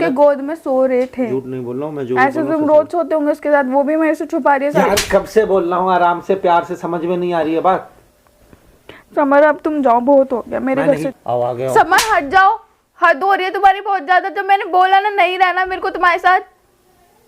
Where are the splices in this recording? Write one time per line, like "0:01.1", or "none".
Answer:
0:01.1
0:11.0